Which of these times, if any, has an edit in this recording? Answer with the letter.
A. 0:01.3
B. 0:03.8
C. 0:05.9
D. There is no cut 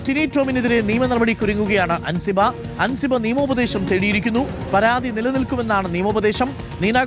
D